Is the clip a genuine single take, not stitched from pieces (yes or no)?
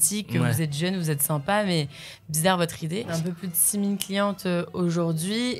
no